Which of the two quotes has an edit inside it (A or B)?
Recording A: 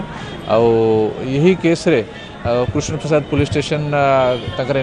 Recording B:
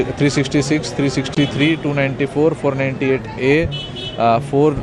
B